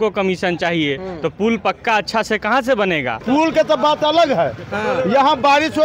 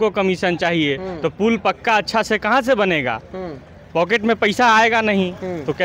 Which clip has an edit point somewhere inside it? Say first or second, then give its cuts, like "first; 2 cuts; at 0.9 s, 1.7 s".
first; 1 cut; at 3.2 s